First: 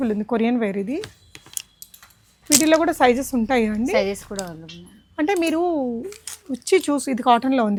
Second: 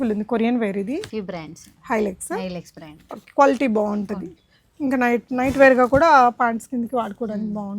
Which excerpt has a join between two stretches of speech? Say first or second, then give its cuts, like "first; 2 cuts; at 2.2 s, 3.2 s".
second; 1 cut; at 1.1 s